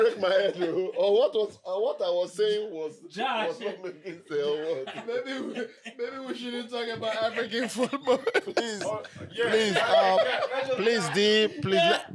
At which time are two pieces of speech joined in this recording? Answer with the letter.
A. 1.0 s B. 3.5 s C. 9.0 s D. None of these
D